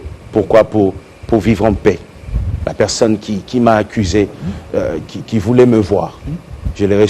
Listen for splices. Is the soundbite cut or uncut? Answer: cut